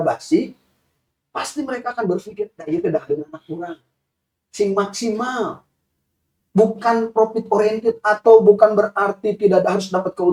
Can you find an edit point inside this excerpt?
no; 0 cuts

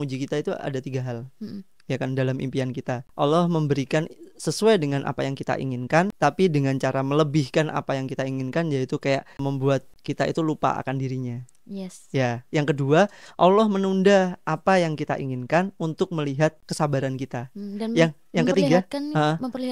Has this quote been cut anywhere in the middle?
yes; 4 cuts; at 3.1 s, 6.1 s, 9.6 s, 16.7 s

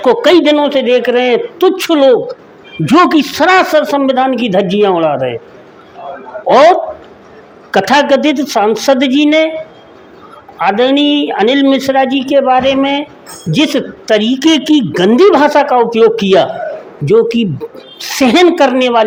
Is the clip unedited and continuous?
yes; 0 cuts

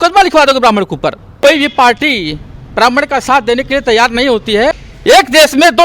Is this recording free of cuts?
no; 2 cuts; at 1.4 s, 4.9 s

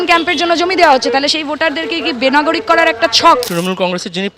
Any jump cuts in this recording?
yes; 1 cut; at 3.5 s

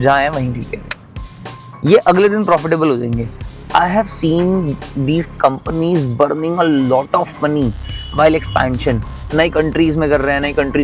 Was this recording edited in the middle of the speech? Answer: no; 0 cuts

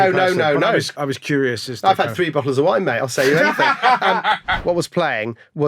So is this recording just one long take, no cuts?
no; 2 cuts; at 0.9 s, 4.5 s

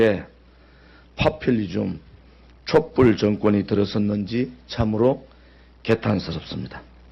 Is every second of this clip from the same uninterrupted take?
no; 1 cut; at 1.8 s

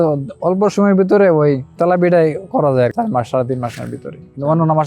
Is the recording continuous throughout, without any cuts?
no; 2 cuts; at 1.7 s, 2.9 s

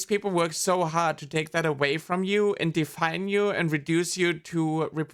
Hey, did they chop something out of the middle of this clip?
no; 0 cuts

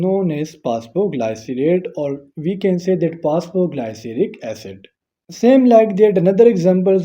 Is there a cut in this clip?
yes; 1 cut; at 5.2 s

